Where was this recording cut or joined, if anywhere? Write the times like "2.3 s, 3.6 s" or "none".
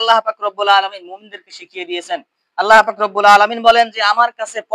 none